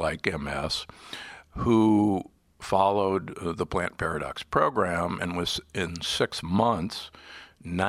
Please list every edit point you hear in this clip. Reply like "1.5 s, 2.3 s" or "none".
none